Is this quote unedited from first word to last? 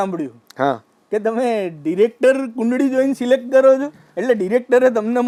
yes; 0 cuts

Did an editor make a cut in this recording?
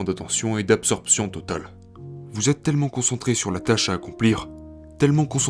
no; 0 cuts

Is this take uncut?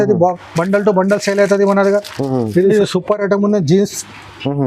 no; 1 cut; at 2.7 s

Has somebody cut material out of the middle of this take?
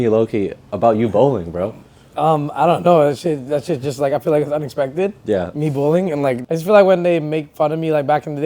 yes; 1 cut; at 6.4 s

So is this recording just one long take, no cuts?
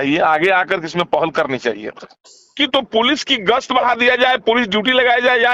no; 1 cut; at 2.5 s

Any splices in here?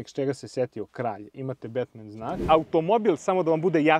yes; 1 cut; at 2.4 s

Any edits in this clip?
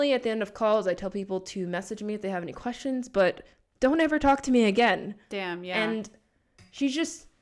no; 0 cuts

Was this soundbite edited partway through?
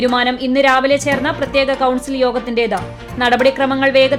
no; 0 cuts

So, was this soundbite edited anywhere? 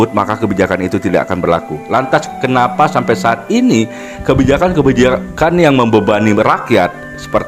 no; 0 cuts

